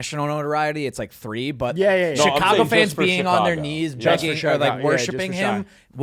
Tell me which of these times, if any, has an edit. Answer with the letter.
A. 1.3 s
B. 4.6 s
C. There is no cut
C